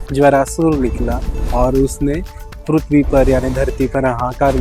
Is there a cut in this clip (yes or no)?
no